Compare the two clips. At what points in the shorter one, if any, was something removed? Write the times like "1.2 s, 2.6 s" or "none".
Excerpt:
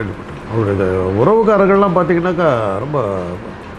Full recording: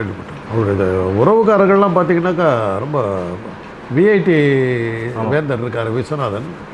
none